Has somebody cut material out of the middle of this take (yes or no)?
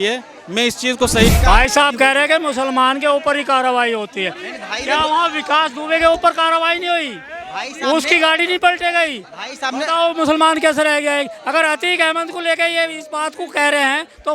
yes